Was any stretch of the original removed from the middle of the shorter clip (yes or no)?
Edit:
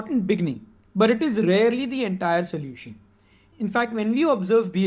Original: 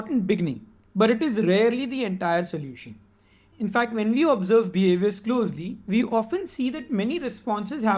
no